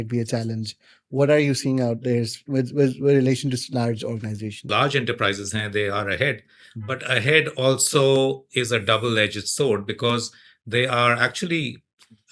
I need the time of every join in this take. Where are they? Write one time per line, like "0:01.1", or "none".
0:04.6